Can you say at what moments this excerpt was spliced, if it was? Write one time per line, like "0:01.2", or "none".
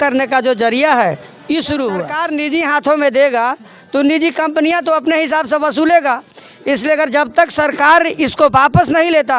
0:02.2